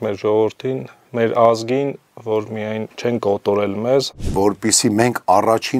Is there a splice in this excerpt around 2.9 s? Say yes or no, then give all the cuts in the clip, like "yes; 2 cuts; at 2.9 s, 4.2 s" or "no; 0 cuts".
yes; 2 cuts; at 2.9 s, 4.3 s